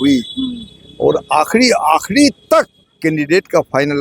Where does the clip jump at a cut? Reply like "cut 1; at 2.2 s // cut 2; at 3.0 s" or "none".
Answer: cut 1; at 2.8 s